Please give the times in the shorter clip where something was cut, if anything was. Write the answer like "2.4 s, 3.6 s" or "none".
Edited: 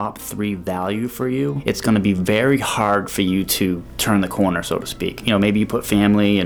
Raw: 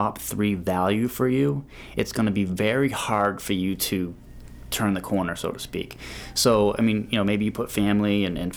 1.6 s, 3.9 s, 5.2 s